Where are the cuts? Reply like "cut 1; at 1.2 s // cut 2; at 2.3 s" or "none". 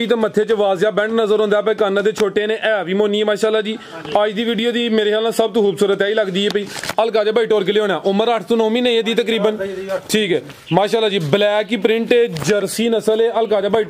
none

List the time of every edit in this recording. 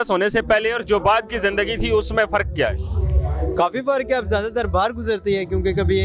none

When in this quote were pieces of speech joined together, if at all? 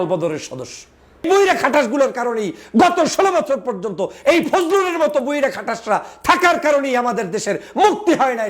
cut 1; at 1.3 s

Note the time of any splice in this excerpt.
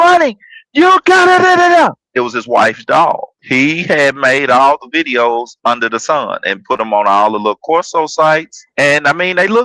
cut 1; at 3.3 s // cut 2; at 8.6 s

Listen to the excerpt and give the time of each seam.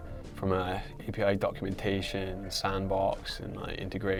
none

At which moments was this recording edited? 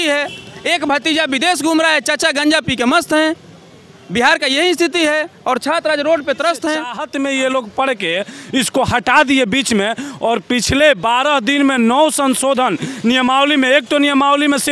cut 1; at 7.0 s

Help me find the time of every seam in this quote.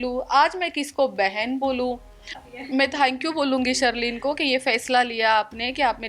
cut 1; at 2.3 s

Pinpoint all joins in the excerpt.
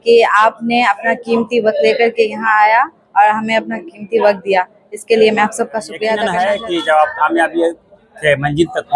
cut 1; at 6.0 s

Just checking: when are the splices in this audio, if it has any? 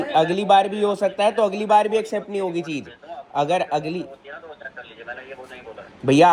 none

